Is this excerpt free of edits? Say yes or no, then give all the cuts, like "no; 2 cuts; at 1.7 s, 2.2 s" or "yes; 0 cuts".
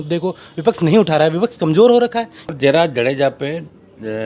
no; 1 cut; at 2.4 s